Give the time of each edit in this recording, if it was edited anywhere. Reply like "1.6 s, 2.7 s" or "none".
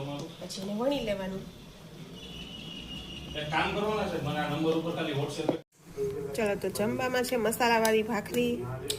5.7 s